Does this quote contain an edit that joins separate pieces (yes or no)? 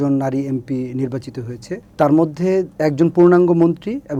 no